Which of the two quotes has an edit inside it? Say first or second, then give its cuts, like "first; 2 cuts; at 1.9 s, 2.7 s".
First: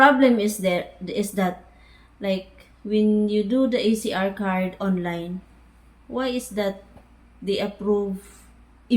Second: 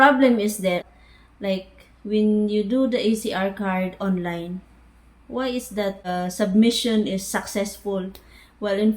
second; 2 cuts; at 1.0 s, 6.1 s